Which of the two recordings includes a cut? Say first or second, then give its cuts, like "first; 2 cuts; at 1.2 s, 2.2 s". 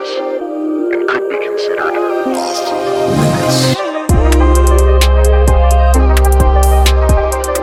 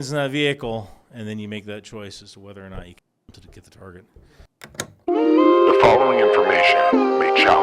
second; 1 cut; at 4.6 s